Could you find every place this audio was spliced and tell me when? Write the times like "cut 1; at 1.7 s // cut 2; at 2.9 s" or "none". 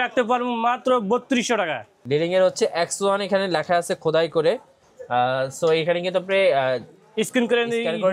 cut 1; at 2.0 s